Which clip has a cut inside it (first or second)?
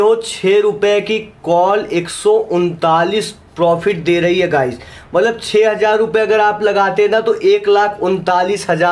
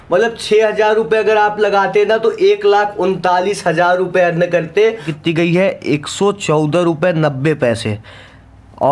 second